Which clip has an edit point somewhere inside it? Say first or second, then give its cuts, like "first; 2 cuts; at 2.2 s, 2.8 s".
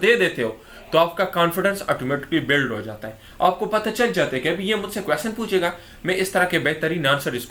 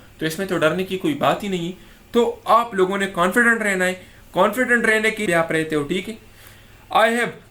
second; 1 cut; at 5.2 s